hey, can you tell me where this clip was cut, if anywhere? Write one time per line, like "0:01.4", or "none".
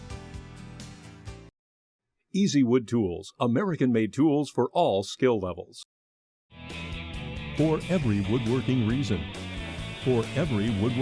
0:01.2